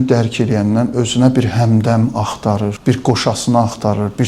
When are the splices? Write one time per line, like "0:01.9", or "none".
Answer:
0:02.8